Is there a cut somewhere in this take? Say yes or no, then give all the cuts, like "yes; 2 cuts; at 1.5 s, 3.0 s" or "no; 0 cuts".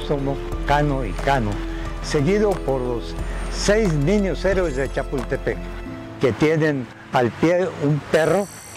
no; 0 cuts